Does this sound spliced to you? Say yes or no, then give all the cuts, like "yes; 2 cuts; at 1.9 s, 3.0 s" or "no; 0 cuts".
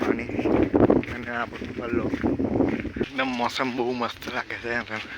yes; 1 cut; at 3.0 s